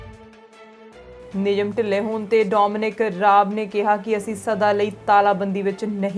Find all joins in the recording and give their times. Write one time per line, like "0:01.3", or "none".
0:01.2